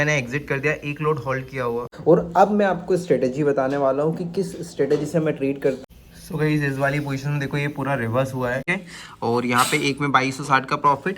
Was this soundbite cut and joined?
yes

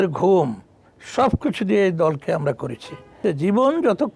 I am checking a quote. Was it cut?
yes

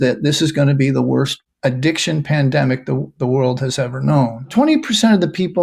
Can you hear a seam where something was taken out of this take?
yes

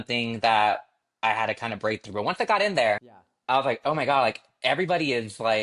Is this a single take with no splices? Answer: yes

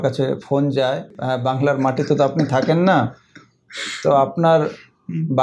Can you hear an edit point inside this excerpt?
yes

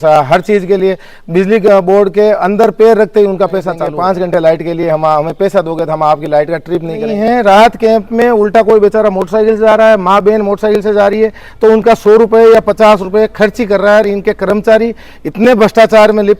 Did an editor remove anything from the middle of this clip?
yes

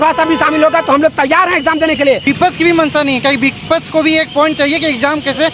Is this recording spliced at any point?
yes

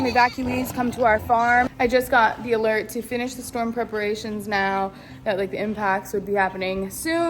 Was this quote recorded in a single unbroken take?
no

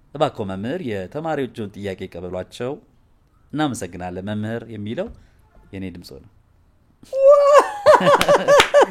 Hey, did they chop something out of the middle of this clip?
no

